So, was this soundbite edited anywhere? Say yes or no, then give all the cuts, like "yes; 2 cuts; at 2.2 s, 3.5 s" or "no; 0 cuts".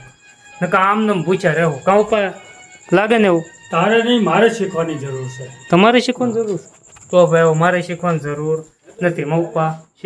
no; 0 cuts